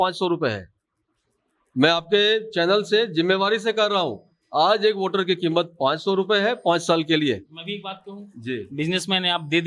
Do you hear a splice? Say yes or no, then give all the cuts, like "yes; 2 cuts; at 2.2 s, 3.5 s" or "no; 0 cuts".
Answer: no; 0 cuts